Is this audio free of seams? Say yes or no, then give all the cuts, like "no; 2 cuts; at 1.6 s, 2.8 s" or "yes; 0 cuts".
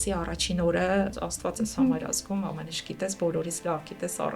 no; 1 cut; at 1.2 s